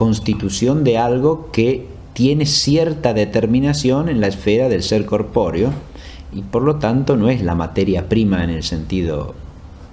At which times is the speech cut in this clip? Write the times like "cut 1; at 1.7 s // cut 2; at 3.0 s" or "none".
cut 1; at 2.8 s